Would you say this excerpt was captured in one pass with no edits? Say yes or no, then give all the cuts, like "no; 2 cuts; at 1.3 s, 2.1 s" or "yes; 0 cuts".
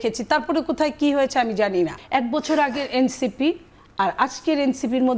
no; 1 cut; at 2.0 s